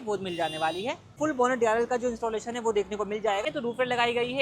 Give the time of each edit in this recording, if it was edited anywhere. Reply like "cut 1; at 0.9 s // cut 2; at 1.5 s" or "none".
cut 1; at 1.1 s // cut 2; at 3.4 s